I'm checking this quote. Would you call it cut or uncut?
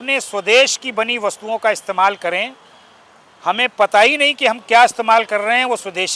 uncut